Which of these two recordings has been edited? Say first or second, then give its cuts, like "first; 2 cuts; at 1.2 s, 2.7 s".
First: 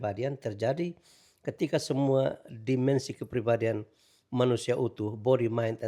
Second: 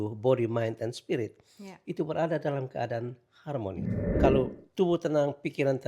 second; 1 cut; at 4.1 s